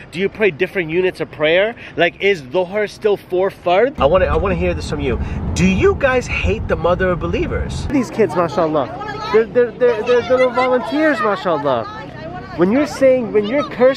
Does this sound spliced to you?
yes; 2 cuts; at 4.0 s, 7.9 s

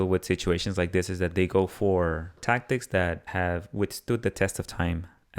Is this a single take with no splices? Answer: no; 2 cuts; at 2.4 s, 3.3 s

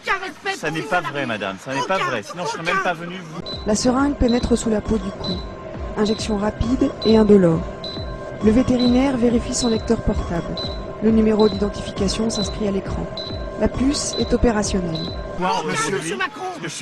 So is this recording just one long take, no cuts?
yes; 0 cuts

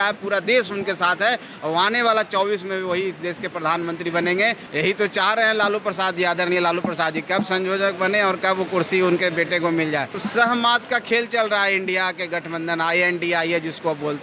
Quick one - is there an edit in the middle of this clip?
yes; 2 cuts; at 4.6 s, 10.2 s

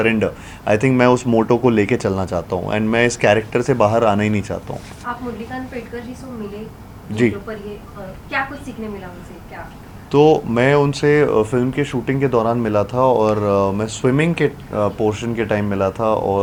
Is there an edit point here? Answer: no; 0 cuts

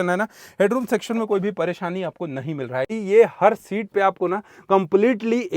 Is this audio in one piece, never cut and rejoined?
no; 1 cut; at 3.0 s

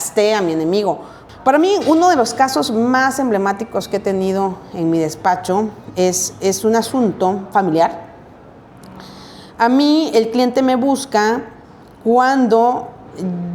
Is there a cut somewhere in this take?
yes; 1 cut; at 1.1 s

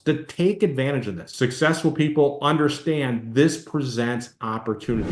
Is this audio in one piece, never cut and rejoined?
no; 1 cut; at 1.2 s

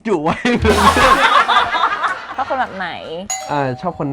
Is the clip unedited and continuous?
no; 1 cut; at 2.3 s

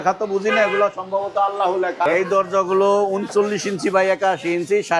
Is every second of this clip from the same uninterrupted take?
no; 1 cut; at 2.1 s

